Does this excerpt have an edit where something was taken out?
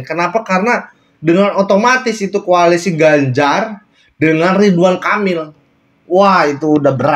no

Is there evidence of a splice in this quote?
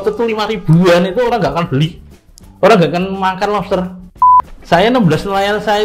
yes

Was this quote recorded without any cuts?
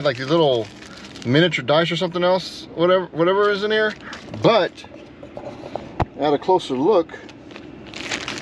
yes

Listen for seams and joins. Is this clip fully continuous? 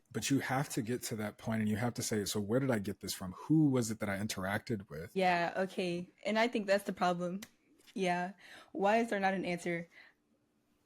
no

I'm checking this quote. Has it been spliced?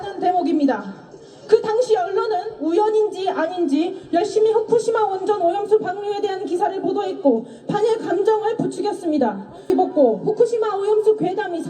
yes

